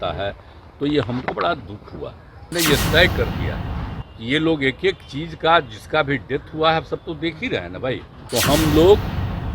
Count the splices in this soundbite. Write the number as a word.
two